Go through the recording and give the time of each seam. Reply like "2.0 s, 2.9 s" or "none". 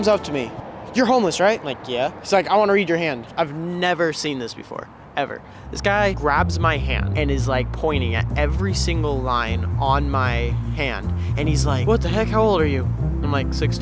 none